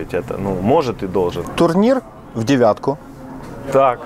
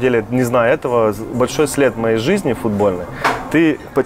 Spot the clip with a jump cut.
first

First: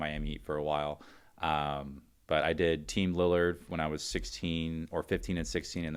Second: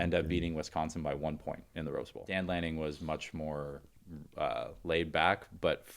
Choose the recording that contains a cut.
second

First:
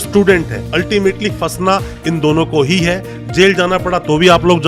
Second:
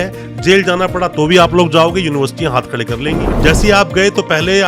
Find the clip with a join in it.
second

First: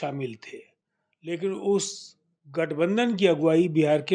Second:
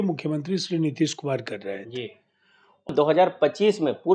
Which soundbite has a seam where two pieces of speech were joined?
second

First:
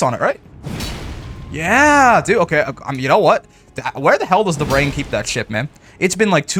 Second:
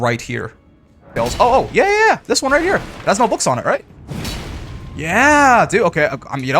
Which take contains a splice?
second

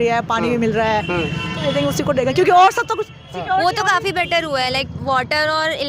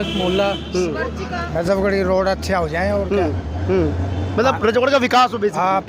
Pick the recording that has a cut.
second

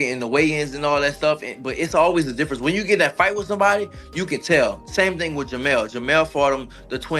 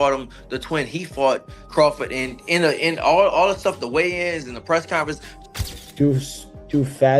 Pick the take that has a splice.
second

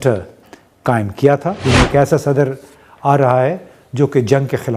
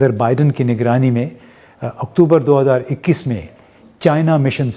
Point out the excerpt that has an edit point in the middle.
first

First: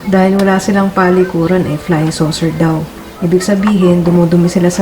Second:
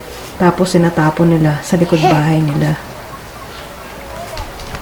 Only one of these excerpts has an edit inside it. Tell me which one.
first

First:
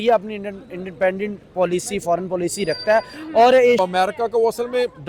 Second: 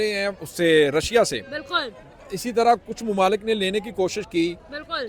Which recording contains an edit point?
first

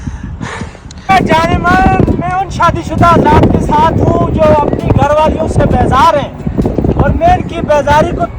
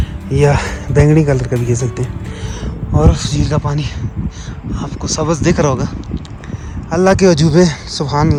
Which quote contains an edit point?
first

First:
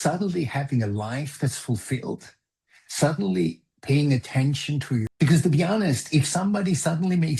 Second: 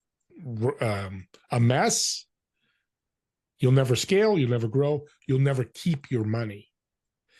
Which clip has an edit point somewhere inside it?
first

